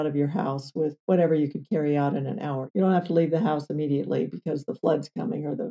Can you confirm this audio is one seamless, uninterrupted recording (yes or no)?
no